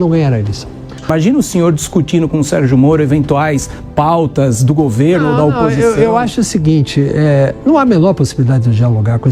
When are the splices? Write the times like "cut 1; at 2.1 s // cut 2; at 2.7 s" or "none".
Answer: cut 1; at 1.1 s